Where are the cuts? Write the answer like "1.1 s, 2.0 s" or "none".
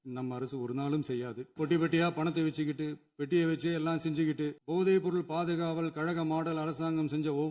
1.4 s, 4.6 s